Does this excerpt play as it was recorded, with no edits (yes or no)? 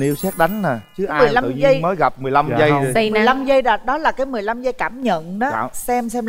yes